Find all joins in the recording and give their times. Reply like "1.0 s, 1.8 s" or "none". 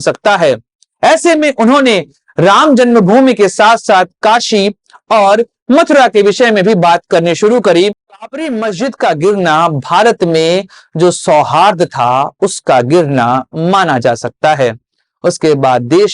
8.1 s

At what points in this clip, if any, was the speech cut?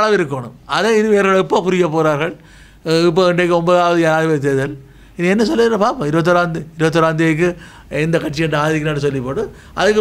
none

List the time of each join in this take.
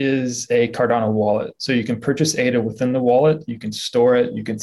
none

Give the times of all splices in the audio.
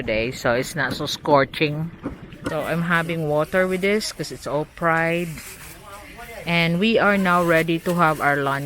2.5 s

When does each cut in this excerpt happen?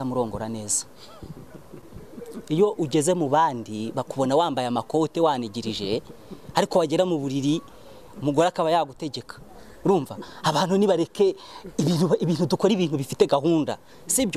none

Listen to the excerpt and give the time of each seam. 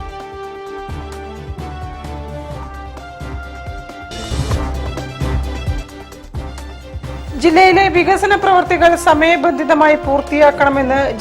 6.7 s

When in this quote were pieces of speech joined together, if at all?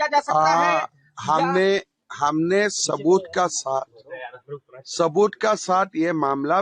none

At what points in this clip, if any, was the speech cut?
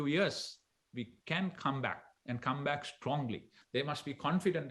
3.6 s

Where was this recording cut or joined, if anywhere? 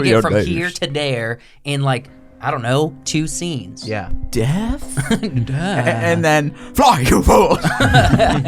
4.1 s

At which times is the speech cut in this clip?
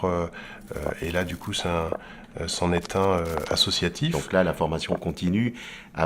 4.1 s

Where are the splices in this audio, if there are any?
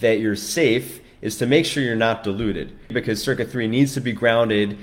2.9 s

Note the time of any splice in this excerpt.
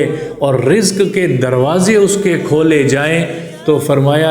none

